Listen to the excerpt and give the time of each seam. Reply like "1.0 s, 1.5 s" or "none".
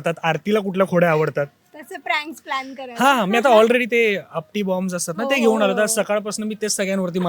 none